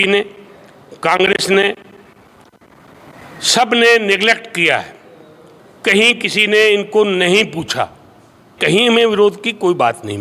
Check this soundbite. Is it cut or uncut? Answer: cut